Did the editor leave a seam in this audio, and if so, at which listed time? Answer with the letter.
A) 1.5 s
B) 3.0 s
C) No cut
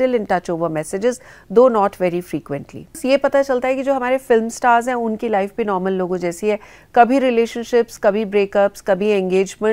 B